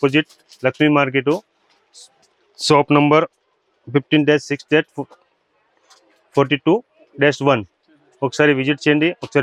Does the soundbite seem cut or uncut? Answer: uncut